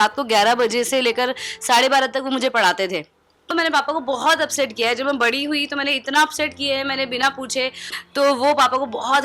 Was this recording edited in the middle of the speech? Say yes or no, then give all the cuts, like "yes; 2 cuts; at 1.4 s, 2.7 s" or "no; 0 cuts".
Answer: yes; 2 cuts; at 3.5 s, 7.9 s